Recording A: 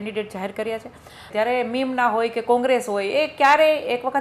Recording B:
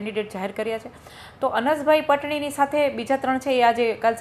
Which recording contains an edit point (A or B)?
A